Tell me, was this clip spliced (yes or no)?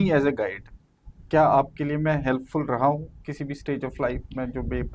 no